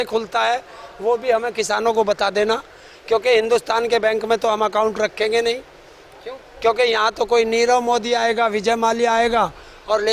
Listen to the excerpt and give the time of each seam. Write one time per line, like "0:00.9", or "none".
none